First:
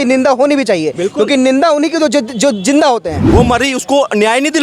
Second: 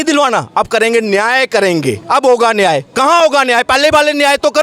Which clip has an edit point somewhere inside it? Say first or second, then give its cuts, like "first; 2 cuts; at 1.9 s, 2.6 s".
first; 1 cut; at 3.2 s